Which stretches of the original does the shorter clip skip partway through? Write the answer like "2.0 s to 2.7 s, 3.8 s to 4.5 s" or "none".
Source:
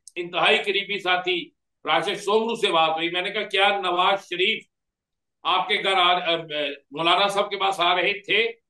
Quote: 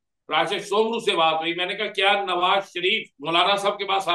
4.7 s to 6.8 s